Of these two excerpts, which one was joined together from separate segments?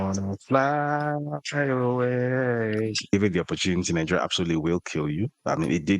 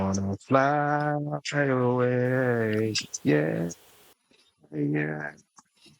first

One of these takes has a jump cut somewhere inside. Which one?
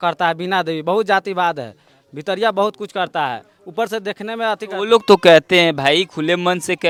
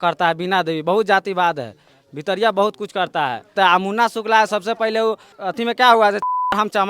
second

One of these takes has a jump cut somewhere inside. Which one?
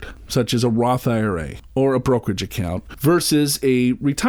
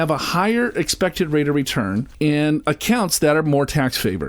second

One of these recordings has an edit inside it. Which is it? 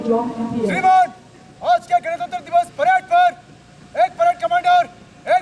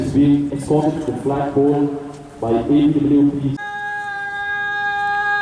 second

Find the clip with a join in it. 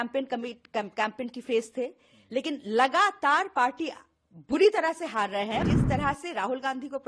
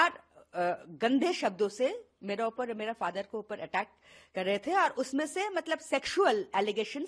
first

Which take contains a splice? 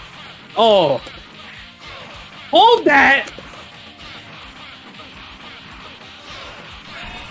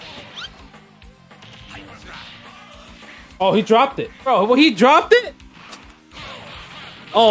second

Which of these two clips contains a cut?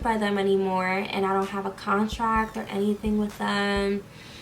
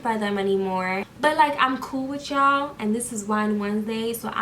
second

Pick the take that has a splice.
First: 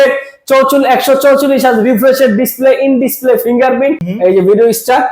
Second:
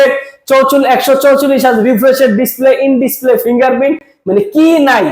first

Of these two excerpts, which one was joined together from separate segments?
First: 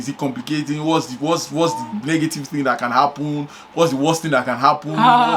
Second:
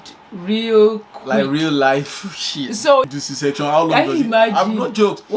second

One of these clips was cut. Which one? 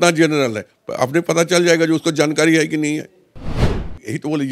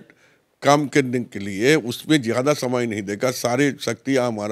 first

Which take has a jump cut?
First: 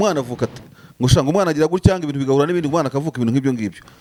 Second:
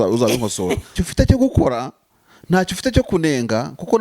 second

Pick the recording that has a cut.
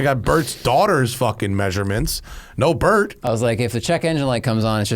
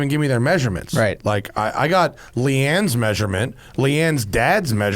first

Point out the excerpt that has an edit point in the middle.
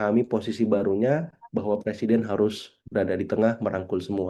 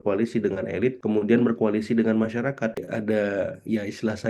second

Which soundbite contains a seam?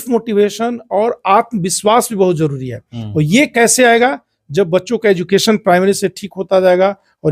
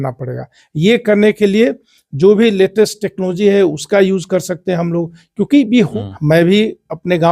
second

